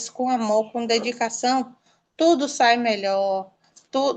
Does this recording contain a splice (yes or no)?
no